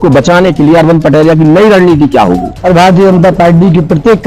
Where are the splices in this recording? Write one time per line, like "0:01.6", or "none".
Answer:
0:02.5